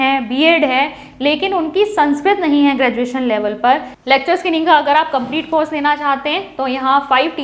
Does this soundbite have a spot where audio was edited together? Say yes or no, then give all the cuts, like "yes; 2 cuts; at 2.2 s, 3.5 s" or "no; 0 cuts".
yes; 1 cut; at 3.9 s